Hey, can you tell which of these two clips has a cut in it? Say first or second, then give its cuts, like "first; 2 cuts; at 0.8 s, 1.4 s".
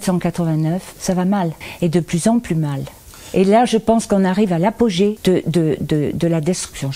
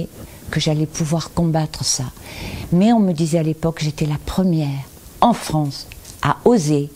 first; 3 cuts; at 0.9 s, 1.6 s, 5.2 s